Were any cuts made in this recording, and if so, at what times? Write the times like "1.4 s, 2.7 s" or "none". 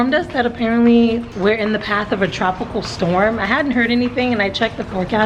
1.3 s